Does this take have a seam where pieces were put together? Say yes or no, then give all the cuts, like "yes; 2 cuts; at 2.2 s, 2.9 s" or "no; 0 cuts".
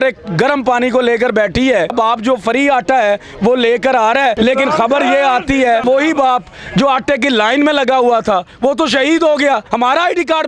yes; 4 cuts; at 1.9 s, 4.3 s, 5.8 s, 9.7 s